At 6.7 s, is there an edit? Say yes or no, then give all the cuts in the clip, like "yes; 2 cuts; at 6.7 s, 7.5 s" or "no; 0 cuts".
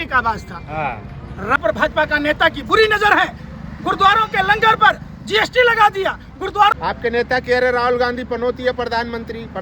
yes; 2 cuts; at 1.6 s, 6.7 s